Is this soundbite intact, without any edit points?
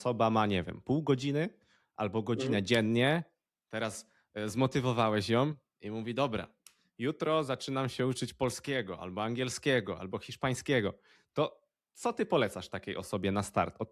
yes; 0 cuts

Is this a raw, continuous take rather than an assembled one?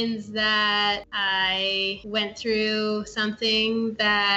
yes; 0 cuts

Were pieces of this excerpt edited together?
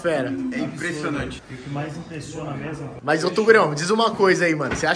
yes; 2 cuts; at 1.5 s, 2.9 s

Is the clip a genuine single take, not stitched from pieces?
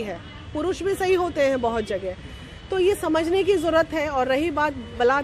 yes; 0 cuts

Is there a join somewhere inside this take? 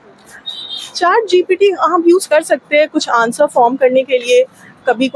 no; 0 cuts

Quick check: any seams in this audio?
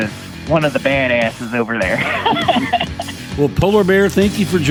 no; 0 cuts

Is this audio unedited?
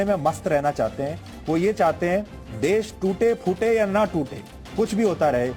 yes; 0 cuts

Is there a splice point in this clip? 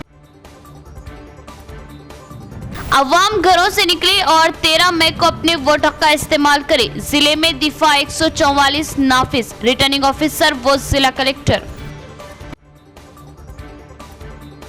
no; 0 cuts

